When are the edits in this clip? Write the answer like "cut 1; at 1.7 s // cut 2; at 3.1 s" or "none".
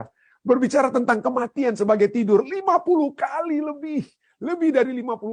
none